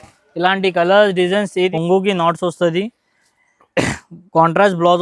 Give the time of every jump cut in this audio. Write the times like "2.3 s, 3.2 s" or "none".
1.7 s